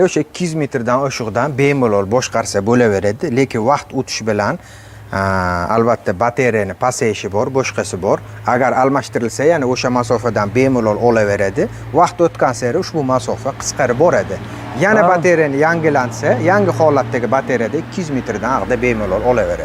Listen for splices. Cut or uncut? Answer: uncut